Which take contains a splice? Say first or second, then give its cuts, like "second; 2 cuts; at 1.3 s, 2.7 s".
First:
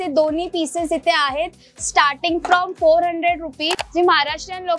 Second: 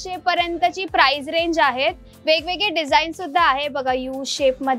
first; 1 cut; at 3.8 s